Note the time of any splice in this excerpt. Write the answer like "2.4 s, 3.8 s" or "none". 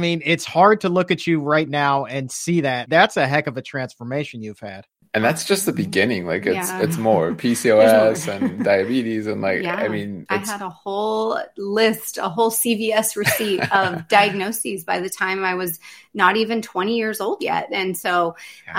2.8 s, 5.0 s, 10.2 s

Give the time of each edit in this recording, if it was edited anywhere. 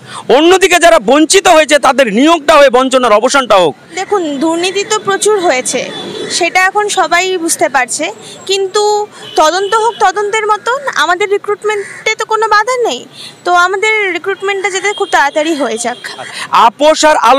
3.9 s, 16.4 s

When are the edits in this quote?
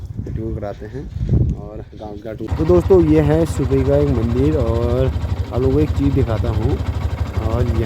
2.5 s

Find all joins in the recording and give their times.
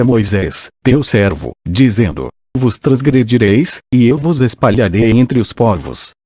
1.0 s

